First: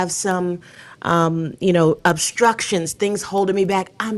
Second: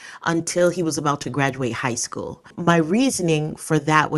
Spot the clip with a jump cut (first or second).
second